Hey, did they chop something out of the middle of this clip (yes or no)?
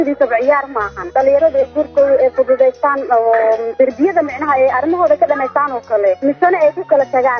yes